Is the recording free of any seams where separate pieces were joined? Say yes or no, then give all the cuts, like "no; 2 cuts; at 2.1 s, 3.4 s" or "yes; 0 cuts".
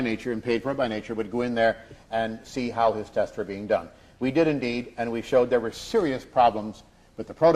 no; 1 cut; at 2.4 s